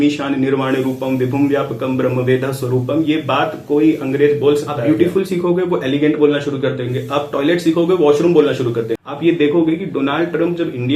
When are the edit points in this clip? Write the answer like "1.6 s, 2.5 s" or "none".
4.7 s, 8.9 s